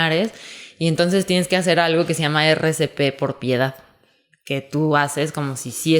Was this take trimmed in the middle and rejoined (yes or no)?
no